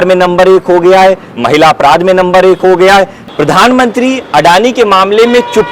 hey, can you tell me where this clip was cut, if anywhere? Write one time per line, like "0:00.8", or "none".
0:03.2